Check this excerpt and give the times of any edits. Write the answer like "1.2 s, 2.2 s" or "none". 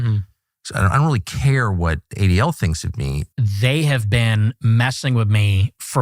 3.2 s